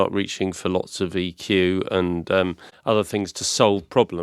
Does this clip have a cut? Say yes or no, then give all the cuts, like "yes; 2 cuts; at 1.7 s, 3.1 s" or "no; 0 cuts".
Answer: yes; 1 cut; at 2.7 s